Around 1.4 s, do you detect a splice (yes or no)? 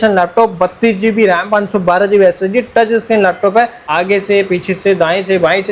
no